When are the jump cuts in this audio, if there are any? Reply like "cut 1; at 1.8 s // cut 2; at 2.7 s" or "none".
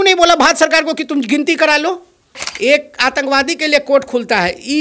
cut 1; at 2.4 s